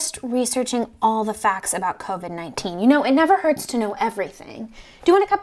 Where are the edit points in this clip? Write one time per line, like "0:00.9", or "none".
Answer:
none